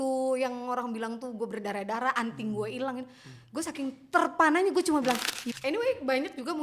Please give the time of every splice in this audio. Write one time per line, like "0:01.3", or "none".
0:05.4